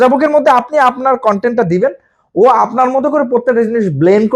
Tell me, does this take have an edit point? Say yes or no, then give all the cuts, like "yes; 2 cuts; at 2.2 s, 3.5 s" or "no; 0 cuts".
no; 0 cuts